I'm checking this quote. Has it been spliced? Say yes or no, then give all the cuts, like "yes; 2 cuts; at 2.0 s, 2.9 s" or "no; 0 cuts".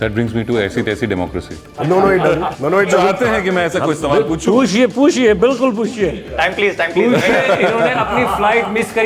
yes; 2 cuts; at 1.6 s, 2.7 s